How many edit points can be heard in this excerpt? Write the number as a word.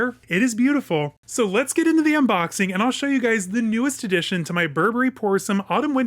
one